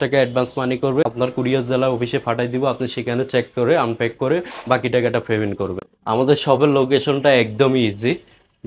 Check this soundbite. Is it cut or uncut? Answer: cut